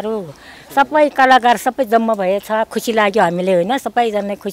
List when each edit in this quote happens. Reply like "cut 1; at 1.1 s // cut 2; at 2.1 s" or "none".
none